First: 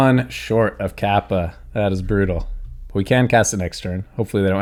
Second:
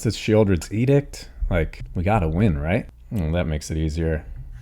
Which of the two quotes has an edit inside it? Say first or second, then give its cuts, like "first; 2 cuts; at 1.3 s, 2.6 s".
second; 2 cuts; at 1.8 s, 3.0 s